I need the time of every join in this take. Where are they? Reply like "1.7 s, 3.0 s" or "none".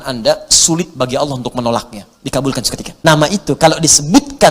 2.8 s